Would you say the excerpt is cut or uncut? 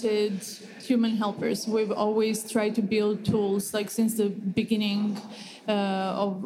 uncut